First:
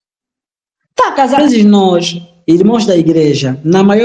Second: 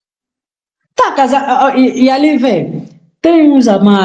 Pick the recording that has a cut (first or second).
first